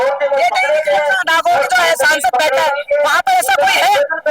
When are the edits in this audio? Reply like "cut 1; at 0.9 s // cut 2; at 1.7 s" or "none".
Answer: none